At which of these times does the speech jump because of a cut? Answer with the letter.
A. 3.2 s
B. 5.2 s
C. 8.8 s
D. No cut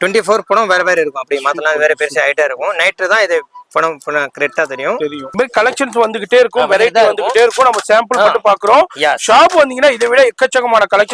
B